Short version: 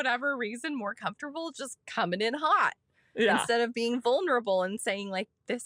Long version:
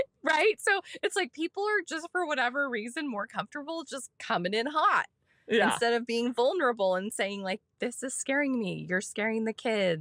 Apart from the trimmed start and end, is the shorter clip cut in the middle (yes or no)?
no